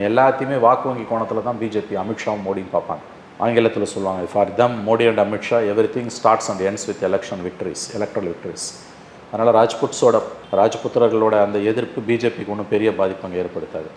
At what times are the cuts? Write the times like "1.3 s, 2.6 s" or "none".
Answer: none